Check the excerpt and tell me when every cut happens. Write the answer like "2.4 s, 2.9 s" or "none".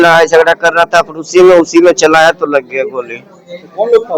none